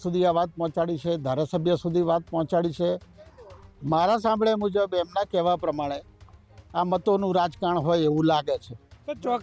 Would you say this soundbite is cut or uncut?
uncut